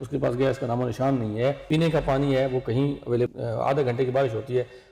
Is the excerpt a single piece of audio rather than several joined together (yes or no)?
no